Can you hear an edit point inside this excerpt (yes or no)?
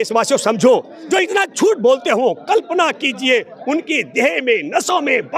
yes